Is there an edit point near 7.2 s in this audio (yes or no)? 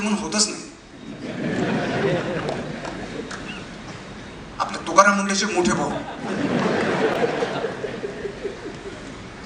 no